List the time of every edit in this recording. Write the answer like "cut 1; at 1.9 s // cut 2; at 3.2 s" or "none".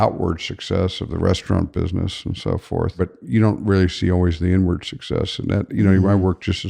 cut 1; at 3.0 s